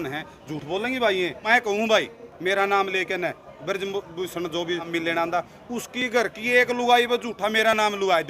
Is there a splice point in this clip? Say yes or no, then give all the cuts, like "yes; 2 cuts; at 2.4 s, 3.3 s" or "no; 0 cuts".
yes; 2 cuts; at 1.4 s, 4.9 s